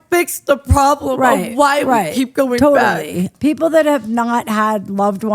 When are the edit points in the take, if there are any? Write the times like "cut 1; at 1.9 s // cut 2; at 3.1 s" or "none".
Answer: cut 1; at 3.3 s